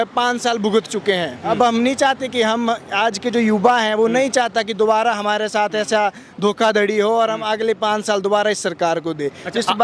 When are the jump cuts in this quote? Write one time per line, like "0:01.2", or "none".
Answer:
none